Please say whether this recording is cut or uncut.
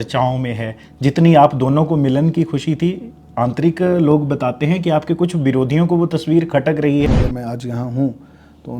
cut